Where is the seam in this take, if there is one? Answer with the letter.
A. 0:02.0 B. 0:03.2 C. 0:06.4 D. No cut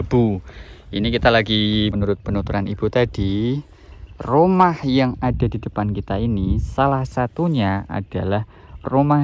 A